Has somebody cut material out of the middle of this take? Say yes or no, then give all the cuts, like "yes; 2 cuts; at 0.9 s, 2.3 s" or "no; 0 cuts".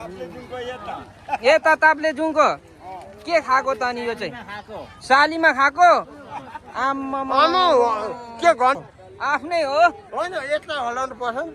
yes; 1 cut; at 8.8 s